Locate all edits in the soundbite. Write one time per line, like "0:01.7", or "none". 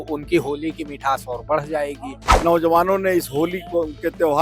0:02.3

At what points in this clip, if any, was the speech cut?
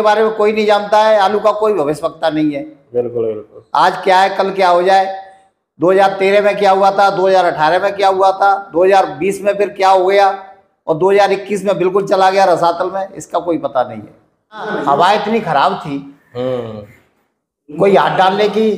0:14.7

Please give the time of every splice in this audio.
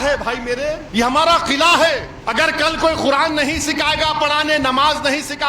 0:00.8
0:02.1

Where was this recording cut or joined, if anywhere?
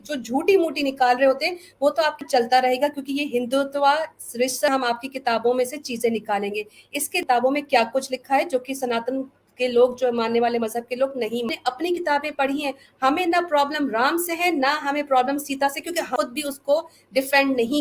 0:02.2
0:04.7
0:07.2
0:11.5
0:16.1

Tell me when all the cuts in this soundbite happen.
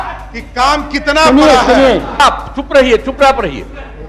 0:02.2

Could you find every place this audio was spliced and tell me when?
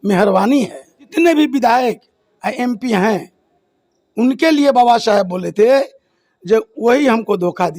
0:01.1

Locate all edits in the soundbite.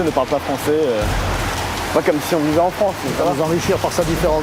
0:01.6

